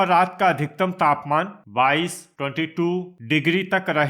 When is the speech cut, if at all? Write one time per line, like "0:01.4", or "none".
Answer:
none